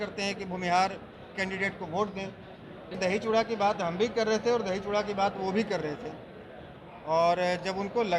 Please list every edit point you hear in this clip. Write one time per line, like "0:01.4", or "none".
0:02.9